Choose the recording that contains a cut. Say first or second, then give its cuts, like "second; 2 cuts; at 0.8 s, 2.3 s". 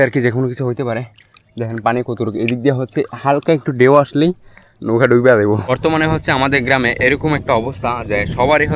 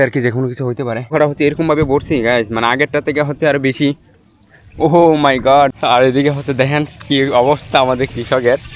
second; 2 cuts; at 1.0 s, 5.8 s